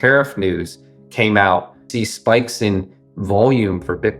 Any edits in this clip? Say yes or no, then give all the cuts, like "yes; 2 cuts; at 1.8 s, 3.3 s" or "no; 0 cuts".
yes; 1 cut; at 1.8 s